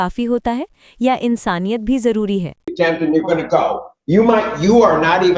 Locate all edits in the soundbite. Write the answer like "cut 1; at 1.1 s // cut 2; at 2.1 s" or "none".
cut 1; at 2.6 s